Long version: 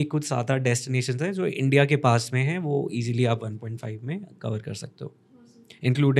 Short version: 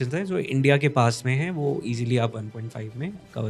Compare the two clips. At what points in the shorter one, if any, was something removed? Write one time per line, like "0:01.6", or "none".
none